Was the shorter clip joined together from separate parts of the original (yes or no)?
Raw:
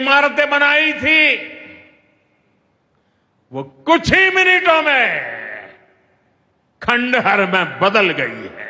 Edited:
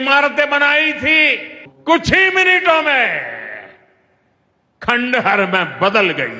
yes